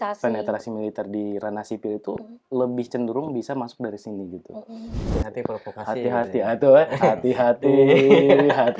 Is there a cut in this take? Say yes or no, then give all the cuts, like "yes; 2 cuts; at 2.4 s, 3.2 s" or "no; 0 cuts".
yes; 1 cut; at 5.0 s